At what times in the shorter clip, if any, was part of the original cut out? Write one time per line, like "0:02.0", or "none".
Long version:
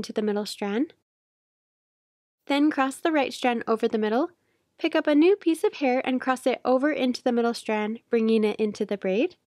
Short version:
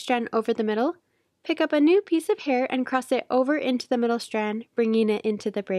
none